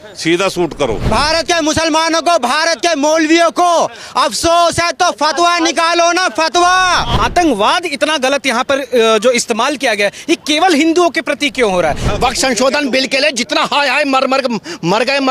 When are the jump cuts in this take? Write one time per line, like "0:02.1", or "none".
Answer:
0:01.1
0:07.1
0:12.1